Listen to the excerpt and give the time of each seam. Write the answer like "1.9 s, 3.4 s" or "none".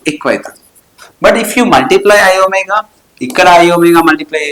none